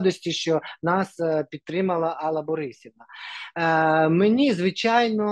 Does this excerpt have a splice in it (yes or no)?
no